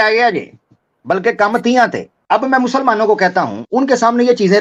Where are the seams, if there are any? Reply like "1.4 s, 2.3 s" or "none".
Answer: 2.1 s, 3.6 s